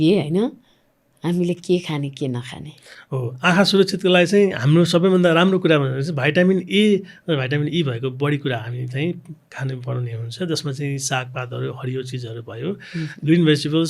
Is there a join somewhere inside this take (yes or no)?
no